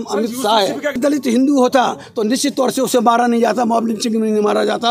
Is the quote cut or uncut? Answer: cut